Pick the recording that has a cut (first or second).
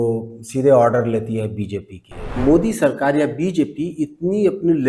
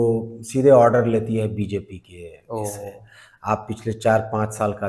first